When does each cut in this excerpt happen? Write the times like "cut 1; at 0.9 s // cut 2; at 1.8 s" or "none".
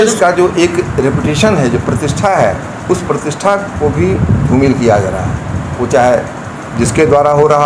none